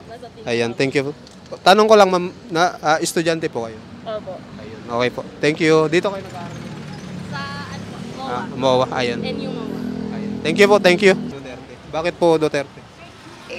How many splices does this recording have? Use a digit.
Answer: 1